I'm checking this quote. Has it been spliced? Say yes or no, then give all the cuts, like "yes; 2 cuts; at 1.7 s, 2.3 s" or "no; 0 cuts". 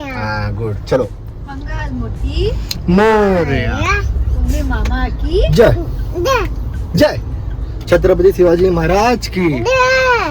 no; 0 cuts